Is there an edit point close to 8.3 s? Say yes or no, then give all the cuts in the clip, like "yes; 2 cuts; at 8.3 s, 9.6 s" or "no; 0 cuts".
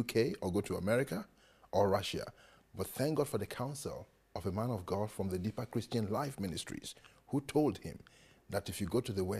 no; 1 cut; at 2.6 s